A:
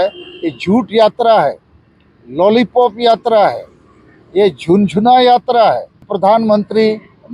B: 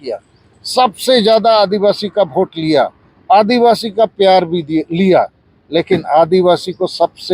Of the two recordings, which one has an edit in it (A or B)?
A